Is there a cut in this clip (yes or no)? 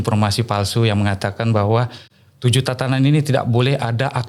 no